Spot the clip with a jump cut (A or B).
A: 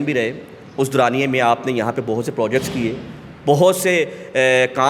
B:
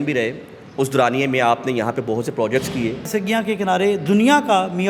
B